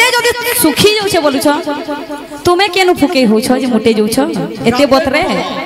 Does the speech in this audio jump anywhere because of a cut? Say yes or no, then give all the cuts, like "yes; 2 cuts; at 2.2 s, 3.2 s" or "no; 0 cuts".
no; 0 cuts